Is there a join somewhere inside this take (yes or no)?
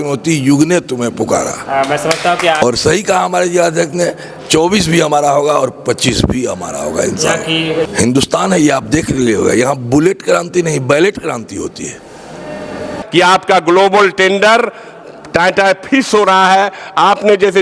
yes